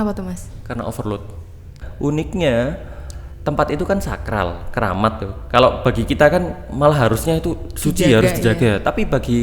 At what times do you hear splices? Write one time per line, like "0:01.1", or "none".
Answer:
0:01.8